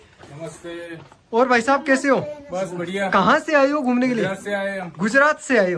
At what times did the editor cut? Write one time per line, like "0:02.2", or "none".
none